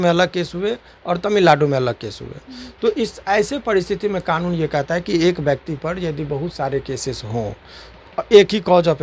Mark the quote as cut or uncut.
uncut